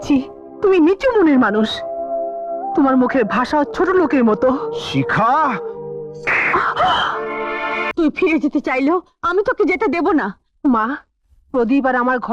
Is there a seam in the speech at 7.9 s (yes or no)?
yes